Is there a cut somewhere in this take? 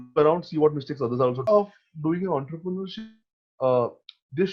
yes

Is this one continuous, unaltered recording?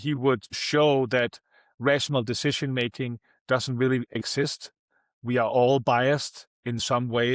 yes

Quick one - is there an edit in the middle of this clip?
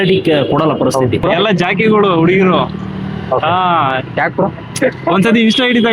yes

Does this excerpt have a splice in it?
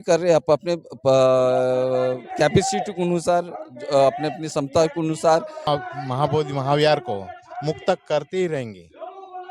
yes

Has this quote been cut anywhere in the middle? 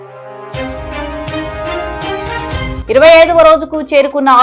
no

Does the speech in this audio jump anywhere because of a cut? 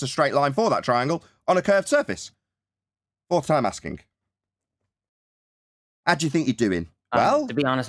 no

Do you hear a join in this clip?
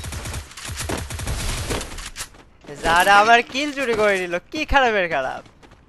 no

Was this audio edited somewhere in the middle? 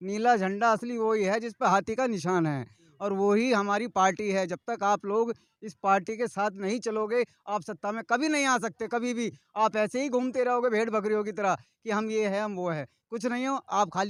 no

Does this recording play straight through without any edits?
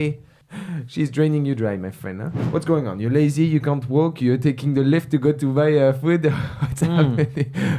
no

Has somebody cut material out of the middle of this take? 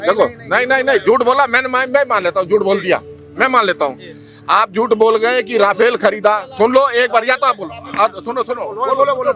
no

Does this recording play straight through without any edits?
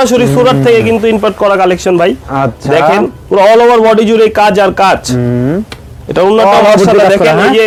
yes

